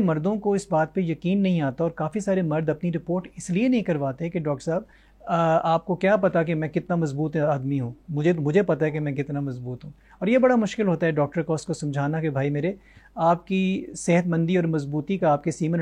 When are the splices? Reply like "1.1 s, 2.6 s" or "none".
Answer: none